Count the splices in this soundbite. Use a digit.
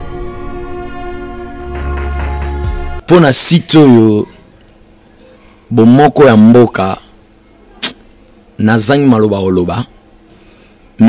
1